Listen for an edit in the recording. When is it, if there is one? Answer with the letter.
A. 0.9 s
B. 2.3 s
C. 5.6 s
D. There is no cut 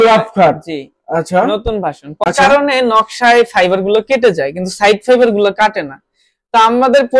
B